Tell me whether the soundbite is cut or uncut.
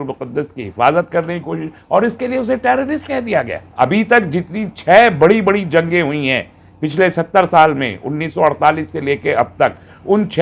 cut